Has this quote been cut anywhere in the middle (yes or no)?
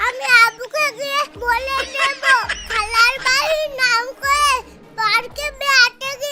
no